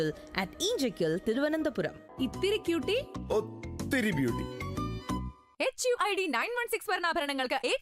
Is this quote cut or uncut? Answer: cut